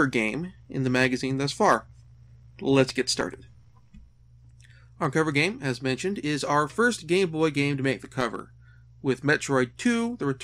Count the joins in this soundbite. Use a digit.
1